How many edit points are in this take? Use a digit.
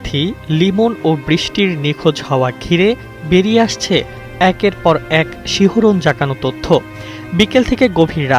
1